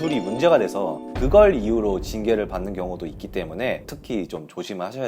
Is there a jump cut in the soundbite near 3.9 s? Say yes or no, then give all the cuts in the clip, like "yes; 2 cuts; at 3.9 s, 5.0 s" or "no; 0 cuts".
yes; 1 cut; at 3.9 s